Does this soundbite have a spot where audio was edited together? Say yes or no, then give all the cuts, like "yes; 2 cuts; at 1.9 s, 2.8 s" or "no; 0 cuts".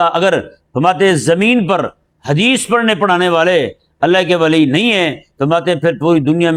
no; 0 cuts